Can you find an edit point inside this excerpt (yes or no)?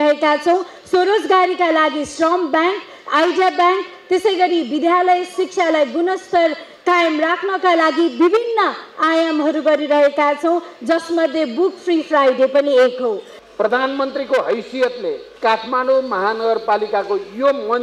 yes